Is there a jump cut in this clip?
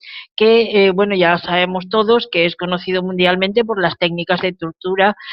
no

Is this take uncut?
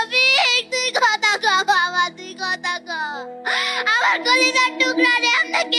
yes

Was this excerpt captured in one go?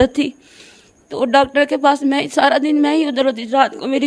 yes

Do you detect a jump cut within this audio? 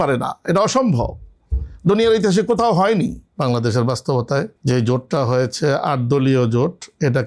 yes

